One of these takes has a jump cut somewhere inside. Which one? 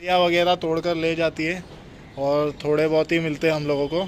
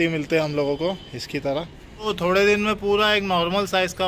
second; 1 cut; at 2.1 s

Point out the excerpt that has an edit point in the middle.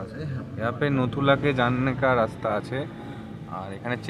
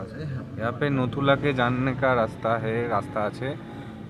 first; 1 cut; at 2.4 s

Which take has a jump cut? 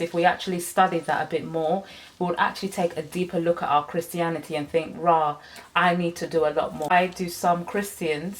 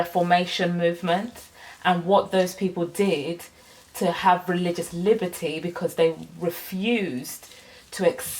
first; 1 cut; at 6.9 s

